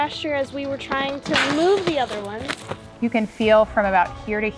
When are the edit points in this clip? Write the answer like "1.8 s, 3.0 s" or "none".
2.9 s